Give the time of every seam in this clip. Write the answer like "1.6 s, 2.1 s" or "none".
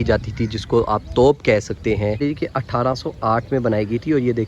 2.2 s